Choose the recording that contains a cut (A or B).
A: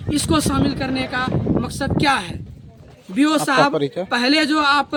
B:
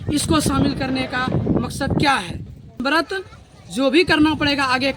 B